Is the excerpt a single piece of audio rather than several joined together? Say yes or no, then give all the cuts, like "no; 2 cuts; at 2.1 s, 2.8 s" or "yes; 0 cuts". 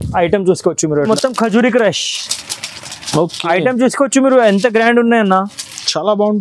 no; 1 cut; at 1.1 s